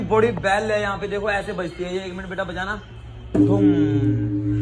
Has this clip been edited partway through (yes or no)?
no